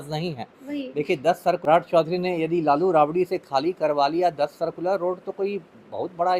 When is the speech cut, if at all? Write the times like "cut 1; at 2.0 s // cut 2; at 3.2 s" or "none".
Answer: cut 1; at 1.6 s